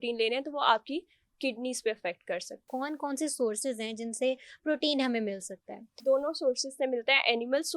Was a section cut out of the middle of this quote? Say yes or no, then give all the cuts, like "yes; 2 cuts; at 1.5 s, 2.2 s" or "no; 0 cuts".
yes; 2 cuts; at 2.7 s, 6.0 s